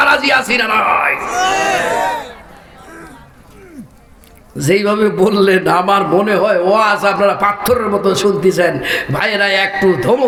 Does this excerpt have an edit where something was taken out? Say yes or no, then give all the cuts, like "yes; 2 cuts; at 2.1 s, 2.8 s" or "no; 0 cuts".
no; 0 cuts